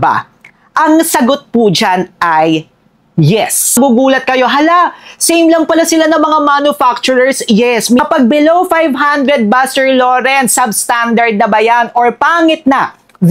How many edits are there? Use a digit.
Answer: 2